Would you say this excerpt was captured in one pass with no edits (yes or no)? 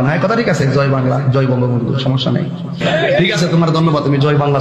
yes